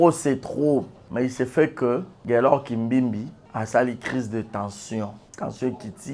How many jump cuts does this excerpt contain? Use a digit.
4